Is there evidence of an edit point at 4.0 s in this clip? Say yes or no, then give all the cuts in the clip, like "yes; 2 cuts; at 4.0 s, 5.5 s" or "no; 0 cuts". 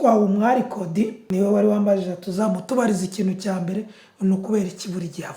no; 1 cut; at 1.2 s